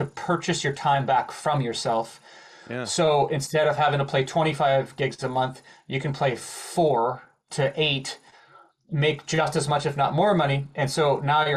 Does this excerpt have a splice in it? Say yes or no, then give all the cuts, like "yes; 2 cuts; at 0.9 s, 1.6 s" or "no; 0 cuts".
no; 0 cuts